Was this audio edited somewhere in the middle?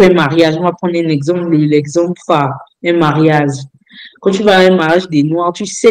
no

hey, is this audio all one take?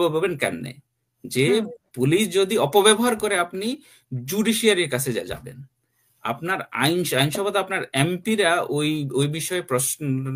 yes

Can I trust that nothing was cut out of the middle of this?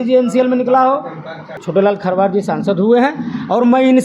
no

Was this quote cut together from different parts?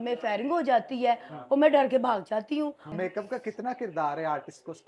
yes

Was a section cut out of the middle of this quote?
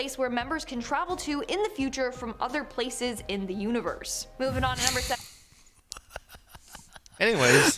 no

